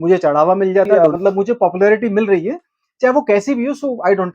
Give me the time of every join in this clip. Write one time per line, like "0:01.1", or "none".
0:00.9